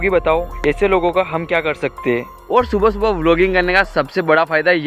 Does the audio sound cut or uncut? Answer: cut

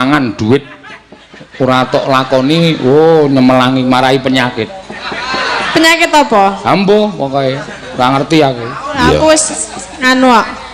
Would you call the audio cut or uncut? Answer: uncut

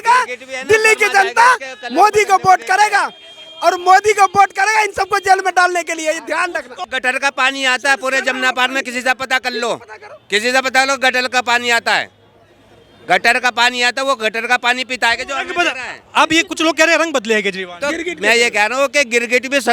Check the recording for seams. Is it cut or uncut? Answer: cut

